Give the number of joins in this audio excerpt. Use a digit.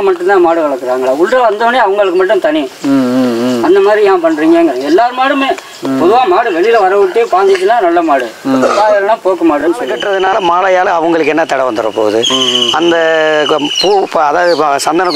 1